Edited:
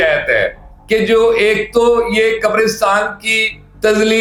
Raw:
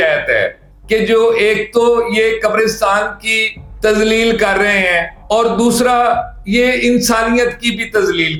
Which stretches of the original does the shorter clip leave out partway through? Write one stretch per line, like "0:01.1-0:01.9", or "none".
none